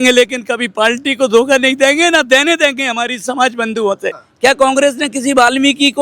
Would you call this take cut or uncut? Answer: cut